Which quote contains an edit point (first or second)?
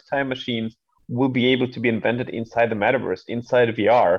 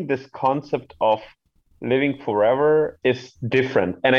second